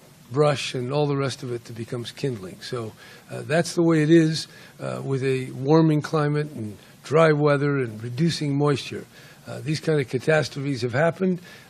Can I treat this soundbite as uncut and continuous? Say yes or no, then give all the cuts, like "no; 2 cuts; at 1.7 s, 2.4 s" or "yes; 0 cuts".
no; 1 cut; at 8.8 s